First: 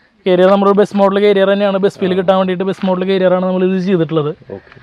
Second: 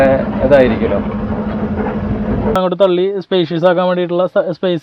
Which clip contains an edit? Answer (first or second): second